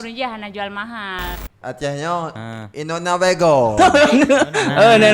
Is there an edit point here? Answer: yes; 1 cut; at 1.4 s

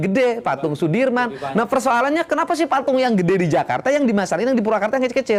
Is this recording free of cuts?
yes; 0 cuts

